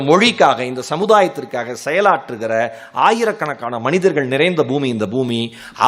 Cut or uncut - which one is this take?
uncut